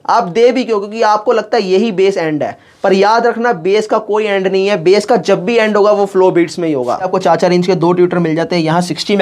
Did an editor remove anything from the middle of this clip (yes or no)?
yes